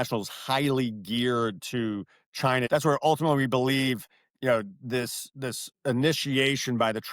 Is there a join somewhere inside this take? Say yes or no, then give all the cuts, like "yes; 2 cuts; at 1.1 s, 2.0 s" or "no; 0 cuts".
yes; 1 cut; at 2.7 s